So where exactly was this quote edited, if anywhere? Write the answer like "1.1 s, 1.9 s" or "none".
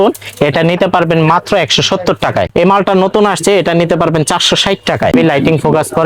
2.5 s, 5.1 s